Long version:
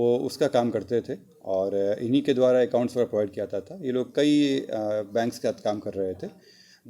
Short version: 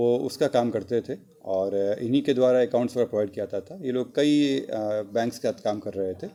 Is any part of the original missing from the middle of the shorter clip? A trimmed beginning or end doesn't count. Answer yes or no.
no